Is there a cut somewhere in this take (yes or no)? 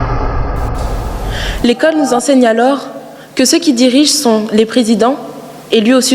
yes